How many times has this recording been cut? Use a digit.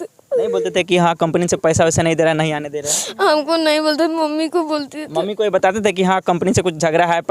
0